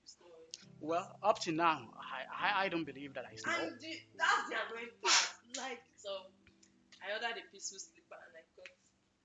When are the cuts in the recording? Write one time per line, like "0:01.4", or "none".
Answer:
0:05.6

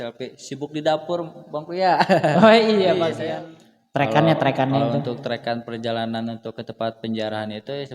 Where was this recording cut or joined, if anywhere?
0:03.2

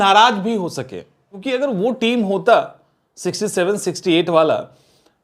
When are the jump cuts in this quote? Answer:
0:01.3

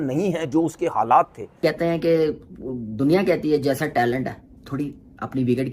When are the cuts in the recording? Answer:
0:01.6

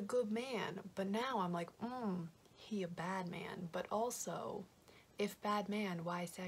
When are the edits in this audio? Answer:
none

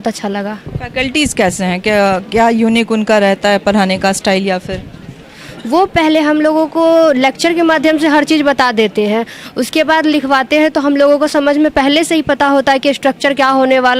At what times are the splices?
none

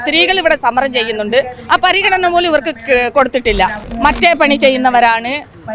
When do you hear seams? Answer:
0:03.8

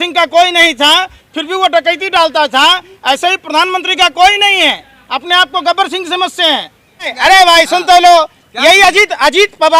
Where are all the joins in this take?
0:07.1

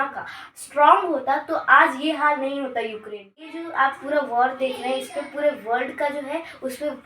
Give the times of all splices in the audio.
0:03.6

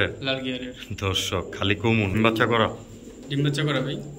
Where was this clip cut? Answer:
0:02.2

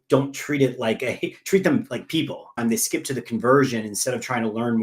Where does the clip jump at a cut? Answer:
0:02.5

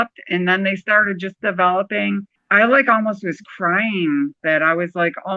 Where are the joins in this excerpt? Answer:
0:04.4

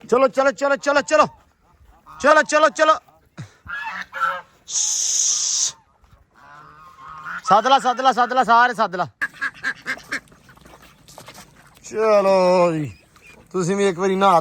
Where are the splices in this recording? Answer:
0:09.2

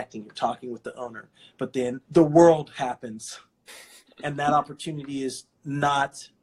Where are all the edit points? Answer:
0:02.0

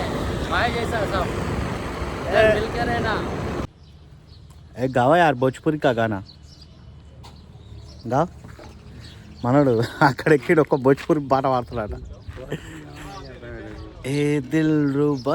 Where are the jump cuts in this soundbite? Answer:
0:03.7

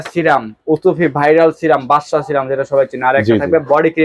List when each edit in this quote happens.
none

